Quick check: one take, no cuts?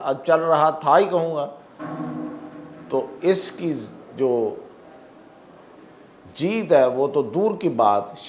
yes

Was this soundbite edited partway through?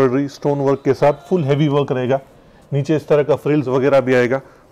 no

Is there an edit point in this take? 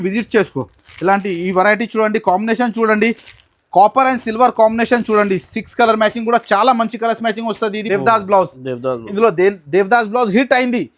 yes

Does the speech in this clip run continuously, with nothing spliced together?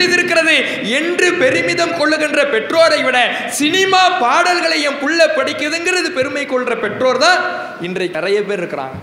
no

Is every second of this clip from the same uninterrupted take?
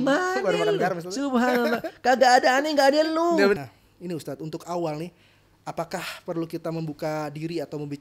no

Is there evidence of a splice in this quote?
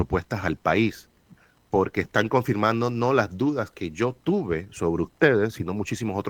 no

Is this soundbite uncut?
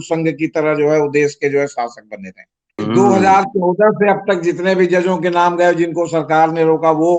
no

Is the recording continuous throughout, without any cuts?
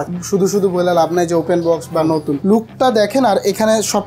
no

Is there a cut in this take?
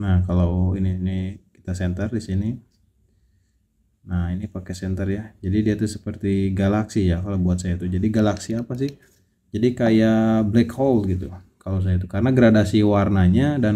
no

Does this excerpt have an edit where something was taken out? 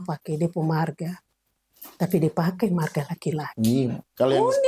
no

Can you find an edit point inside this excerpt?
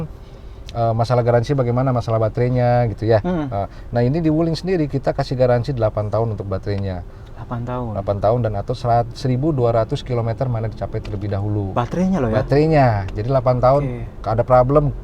no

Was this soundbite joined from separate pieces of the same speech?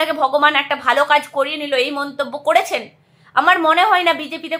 no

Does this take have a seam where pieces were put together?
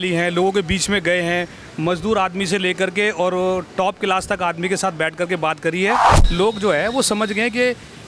yes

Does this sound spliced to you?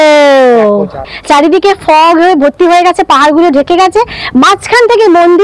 yes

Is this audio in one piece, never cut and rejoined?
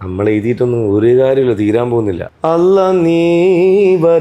no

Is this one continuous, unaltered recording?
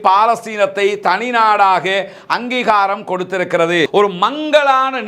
no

